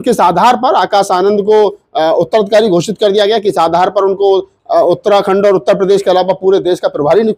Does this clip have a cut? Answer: no; 0 cuts

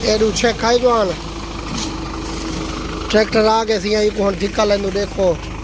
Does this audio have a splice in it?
no; 0 cuts

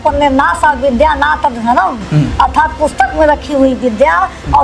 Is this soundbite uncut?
yes; 0 cuts

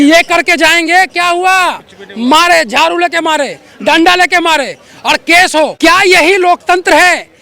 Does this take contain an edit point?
yes; 1 cut; at 5.7 s

